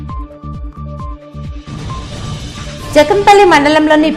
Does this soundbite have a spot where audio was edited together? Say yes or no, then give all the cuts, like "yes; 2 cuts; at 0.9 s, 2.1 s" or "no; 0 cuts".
yes; 2 cuts; at 0.7 s, 1.8 s